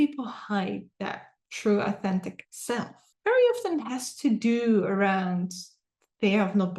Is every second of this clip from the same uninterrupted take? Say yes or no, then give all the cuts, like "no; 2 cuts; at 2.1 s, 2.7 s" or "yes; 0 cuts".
no; 1 cut; at 3.0 s